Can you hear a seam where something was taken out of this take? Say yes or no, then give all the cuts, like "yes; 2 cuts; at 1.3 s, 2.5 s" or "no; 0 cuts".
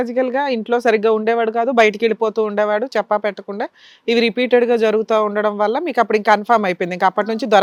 no; 0 cuts